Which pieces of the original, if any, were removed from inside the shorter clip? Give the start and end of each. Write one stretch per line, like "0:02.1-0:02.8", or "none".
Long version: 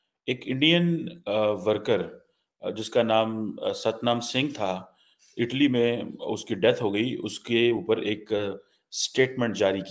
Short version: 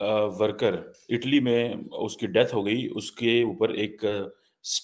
0:02.2-0:05.2